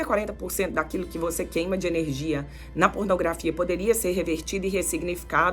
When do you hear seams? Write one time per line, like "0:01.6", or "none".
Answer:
none